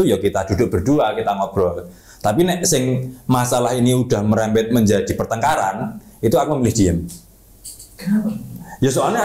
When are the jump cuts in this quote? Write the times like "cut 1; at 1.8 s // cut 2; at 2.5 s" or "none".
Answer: none